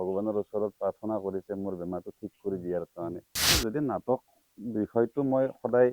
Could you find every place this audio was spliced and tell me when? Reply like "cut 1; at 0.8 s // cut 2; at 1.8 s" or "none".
cut 1; at 3.5 s